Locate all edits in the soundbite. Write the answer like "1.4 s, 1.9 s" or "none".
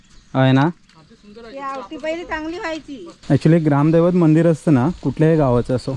3.1 s